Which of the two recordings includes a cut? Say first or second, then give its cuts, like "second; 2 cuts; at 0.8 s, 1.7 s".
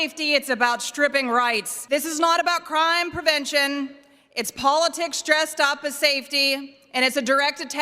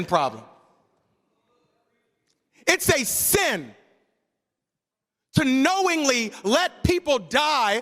first; 1 cut; at 1.7 s